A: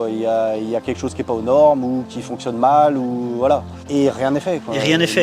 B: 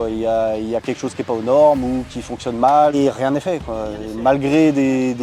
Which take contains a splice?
B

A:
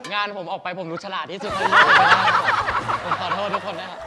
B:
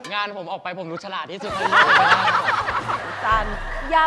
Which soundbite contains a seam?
B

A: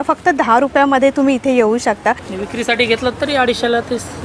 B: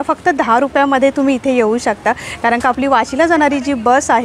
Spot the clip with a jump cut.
A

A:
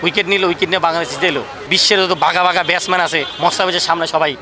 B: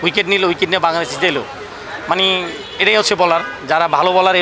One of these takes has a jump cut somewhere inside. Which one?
A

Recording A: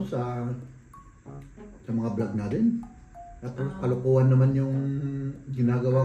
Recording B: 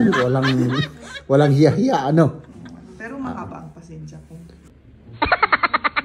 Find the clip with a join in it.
B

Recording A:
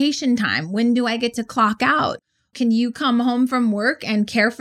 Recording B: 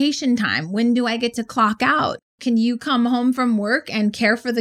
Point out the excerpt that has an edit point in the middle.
B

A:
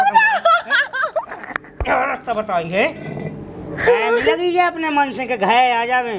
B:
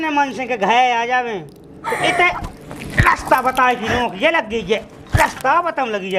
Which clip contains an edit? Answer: A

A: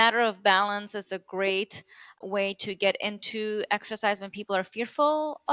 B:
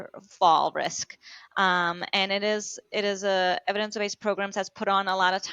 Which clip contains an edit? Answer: A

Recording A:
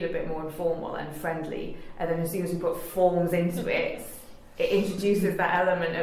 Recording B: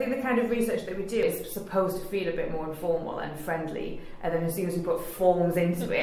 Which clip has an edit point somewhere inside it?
B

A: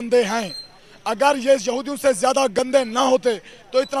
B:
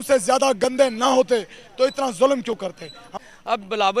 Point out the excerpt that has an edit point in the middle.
B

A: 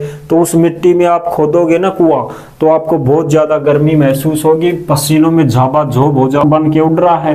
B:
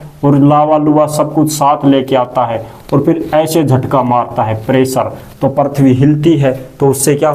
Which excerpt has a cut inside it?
A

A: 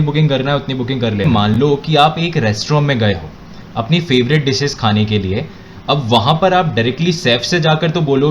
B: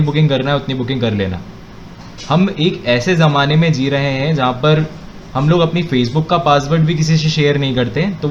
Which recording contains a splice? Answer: A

